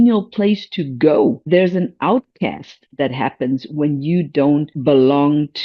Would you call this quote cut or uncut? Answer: cut